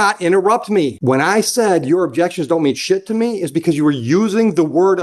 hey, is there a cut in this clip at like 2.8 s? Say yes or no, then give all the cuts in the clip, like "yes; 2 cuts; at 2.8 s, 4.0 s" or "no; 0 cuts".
no; 1 cut; at 1.0 s